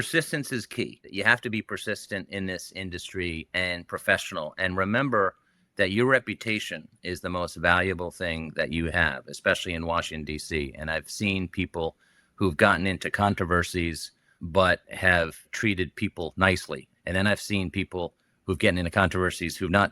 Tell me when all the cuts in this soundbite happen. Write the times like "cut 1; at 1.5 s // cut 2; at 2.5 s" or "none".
cut 1; at 1.0 s // cut 2; at 14.3 s // cut 3; at 15.4 s // cut 4; at 16.9 s